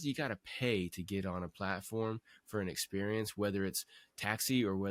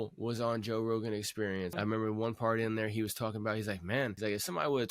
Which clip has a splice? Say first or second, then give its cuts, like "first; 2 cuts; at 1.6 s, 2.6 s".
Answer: second; 2 cuts; at 1.7 s, 4.1 s